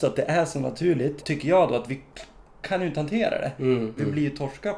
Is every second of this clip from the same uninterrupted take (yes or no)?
no